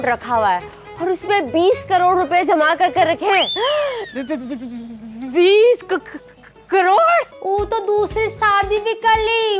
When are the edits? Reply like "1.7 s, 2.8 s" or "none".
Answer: 7.4 s